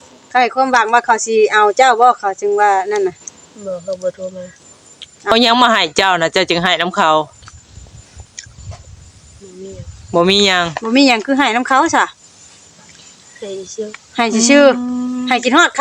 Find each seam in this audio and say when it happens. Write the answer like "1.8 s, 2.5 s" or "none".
5.3 s